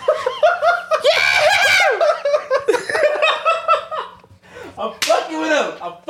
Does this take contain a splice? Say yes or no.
no